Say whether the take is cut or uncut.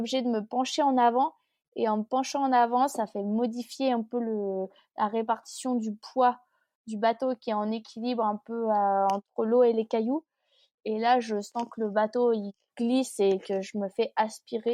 uncut